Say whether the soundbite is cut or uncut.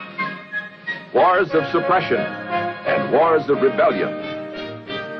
uncut